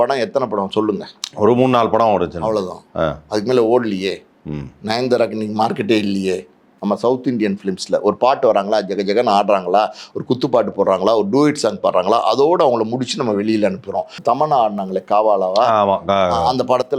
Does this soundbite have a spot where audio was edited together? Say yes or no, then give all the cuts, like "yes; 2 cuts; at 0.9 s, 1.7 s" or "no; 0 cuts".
yes; 2 cuts; at 6.7 s, 14.2 s